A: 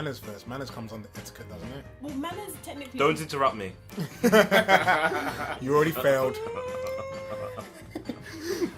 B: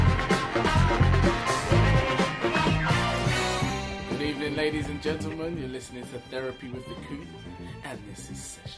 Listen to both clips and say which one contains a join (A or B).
A